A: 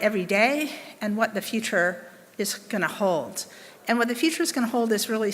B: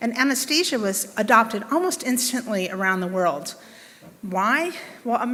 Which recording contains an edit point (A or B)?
A